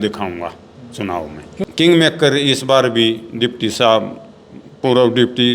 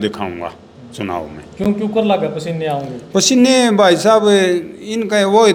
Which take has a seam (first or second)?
first